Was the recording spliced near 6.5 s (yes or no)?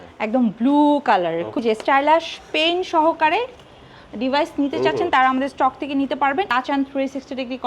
yes